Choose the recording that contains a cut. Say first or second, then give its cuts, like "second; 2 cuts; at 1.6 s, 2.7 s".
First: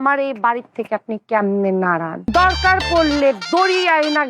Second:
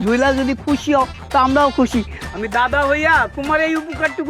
first; 1 cut; at 2.2 s